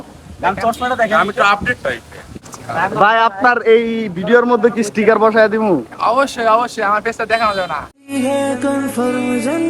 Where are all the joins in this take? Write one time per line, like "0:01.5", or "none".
0:02.5